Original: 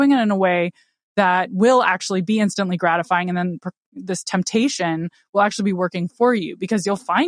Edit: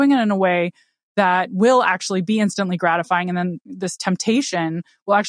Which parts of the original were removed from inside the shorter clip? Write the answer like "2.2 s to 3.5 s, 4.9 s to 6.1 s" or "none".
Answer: 3.6 s to 3.9 s